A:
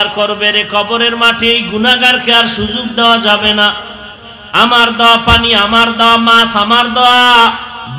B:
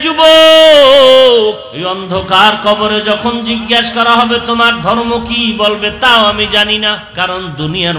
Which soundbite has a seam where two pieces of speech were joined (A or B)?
B